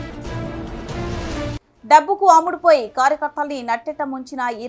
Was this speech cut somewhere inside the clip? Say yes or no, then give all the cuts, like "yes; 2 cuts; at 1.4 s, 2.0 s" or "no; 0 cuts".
yes; 1 cut; at 1.7 s